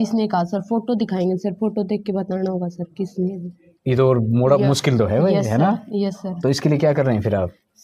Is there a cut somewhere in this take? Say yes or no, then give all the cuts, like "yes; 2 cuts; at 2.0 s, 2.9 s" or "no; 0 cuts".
no; 0 cuts